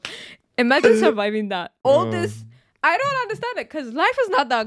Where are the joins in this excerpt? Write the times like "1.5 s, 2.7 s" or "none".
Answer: 1.8 s